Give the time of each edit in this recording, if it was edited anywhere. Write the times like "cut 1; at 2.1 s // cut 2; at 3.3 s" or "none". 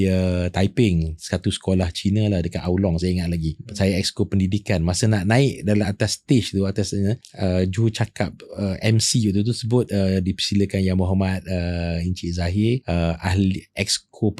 cut 1; at 3.6 s // cut 2; at 7.3 s // cut 3; at 12.8 s